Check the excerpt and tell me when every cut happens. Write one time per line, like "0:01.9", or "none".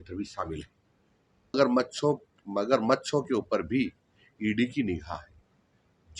0:01.5